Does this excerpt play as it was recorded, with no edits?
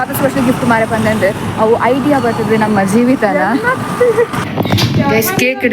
no; 1 cut; at 4.4 s

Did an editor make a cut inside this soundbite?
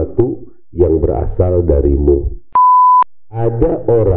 yes; 2 cuts; at 2.4 s, 3.2 s

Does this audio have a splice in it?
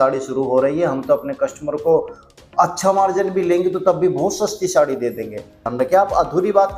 yes; 1 cut; at 5.7 s

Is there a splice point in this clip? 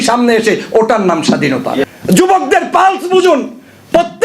yes; 1 cut; at 1.8 s

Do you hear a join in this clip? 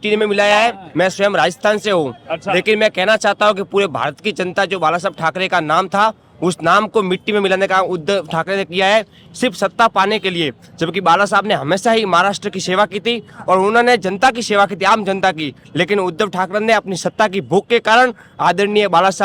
no; 0 cuts

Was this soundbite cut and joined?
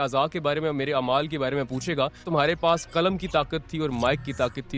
yes; 1 cut; at 2.3 s

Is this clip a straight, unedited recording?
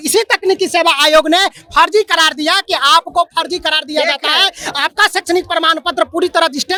yes; 0 cuts

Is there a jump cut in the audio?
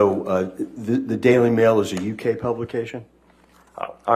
no; 0 cuts

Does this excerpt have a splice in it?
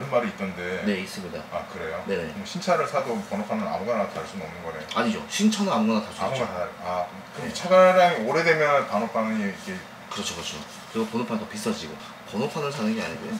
no; 0 cuts

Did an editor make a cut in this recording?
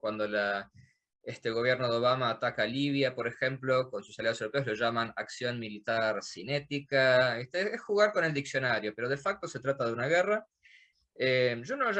no; 0 cuts

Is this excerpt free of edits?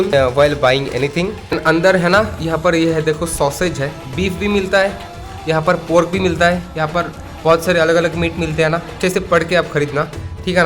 no; 2 cuts; at 1.4 s, 4.0 s

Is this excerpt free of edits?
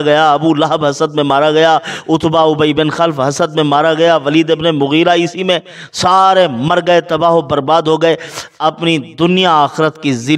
yes; 0 cuts

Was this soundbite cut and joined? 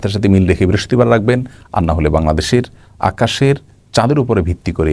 no; 0 cuts

